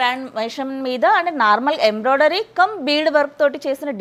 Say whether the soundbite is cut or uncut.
uncut